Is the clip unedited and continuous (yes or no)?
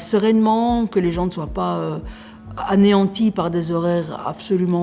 yes